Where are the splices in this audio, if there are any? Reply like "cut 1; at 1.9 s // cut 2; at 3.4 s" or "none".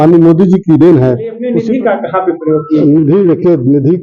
cut 1; at 1.4 s